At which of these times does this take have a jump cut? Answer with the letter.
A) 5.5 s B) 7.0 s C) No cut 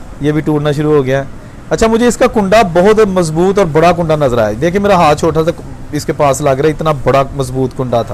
C